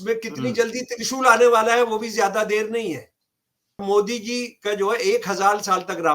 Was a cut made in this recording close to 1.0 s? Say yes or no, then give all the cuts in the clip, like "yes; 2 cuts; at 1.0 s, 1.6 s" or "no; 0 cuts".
no; 1 cut; at 3.8 s